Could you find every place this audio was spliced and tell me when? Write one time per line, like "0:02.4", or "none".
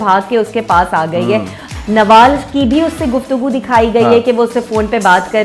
0:01.7